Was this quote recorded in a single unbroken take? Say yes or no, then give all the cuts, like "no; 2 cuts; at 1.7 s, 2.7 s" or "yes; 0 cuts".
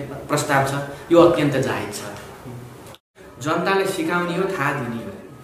no; 1 cut; at 3.0 s